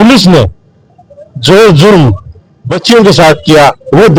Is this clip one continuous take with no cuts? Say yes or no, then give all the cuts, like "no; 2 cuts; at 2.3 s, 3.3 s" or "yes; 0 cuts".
yes; 0 cuts